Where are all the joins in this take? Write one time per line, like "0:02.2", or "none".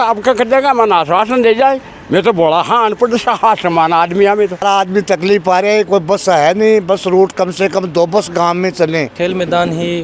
0:04.6
0:09.1